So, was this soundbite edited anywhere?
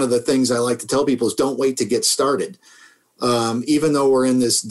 no; 0 cuts

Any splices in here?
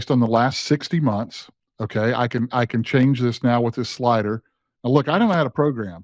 no; 0 cuts

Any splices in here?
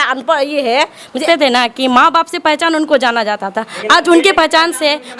yes; 1 cut; at 1.2 s

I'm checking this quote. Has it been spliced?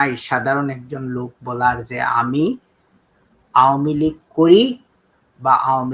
no; 0 cuts

